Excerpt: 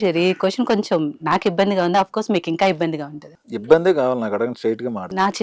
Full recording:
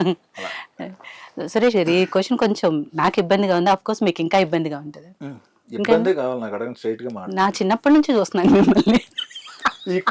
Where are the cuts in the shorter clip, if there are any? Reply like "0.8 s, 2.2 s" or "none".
3.7 s